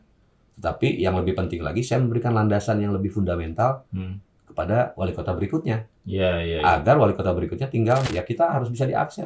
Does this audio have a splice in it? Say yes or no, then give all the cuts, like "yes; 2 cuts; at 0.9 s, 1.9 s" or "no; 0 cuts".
yes; 1 cut; at 8.1 s